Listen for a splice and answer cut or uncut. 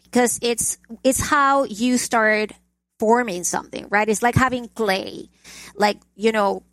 uncut